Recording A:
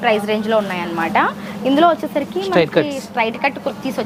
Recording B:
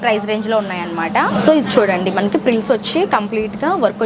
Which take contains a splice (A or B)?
B